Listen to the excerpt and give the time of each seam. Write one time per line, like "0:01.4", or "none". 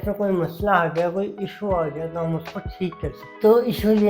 none